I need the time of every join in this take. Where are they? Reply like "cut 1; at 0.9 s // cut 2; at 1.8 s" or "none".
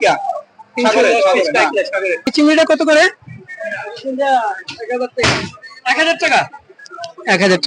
cut 1; at 2.3 s